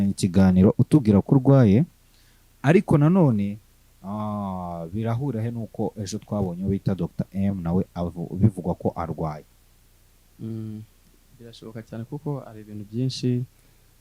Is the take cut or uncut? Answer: uncut